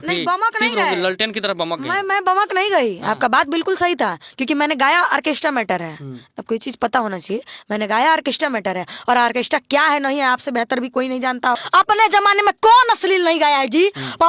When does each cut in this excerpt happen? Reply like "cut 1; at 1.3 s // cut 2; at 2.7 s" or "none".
cut 1; at 11.6 s